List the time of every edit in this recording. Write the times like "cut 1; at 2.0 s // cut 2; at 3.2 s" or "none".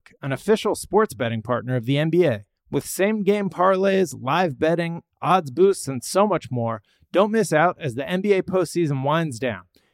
none